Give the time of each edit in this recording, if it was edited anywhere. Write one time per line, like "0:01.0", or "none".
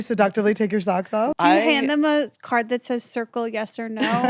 0:01.3